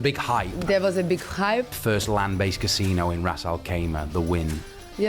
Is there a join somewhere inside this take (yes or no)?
yes